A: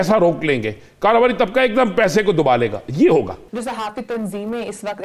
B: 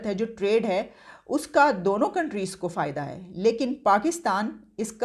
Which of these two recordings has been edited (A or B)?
A